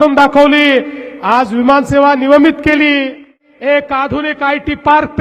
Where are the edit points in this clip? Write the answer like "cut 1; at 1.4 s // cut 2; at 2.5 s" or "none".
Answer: cut 1; at 3.5 s